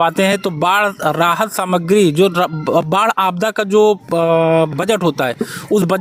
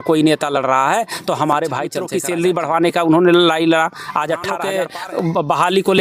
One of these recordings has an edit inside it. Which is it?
second; 2 cuts; at 2.1 s, 4.7 s

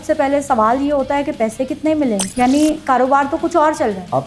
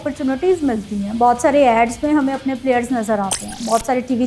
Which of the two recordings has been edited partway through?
first; 1 cut; at 2.3 s

